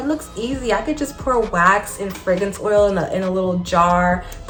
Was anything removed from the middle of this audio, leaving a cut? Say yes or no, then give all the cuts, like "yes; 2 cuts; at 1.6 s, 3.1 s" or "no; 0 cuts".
no; 0 cuts